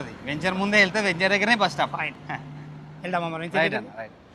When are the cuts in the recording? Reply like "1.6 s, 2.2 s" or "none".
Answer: none